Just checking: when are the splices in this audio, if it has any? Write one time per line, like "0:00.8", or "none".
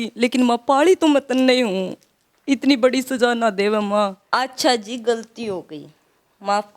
0:04.2